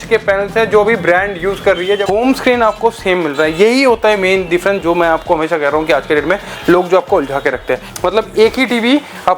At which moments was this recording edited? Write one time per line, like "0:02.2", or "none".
0:02.0
0:07.9